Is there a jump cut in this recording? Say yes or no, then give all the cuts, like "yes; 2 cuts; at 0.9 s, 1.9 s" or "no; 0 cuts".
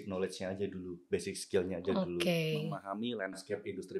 yes; 1 cut; at 2.8 s